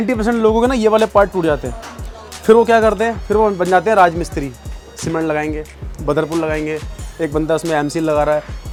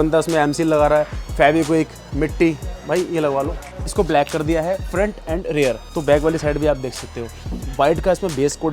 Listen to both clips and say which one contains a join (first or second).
second